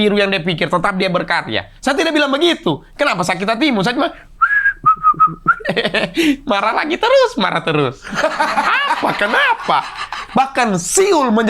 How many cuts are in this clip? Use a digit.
1